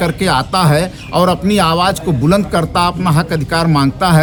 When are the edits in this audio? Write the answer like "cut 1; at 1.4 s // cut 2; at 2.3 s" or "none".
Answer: none